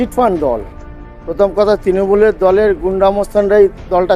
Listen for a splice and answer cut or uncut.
uncut